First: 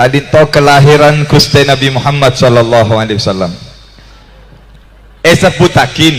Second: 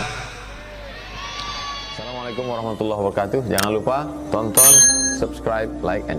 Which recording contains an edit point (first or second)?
second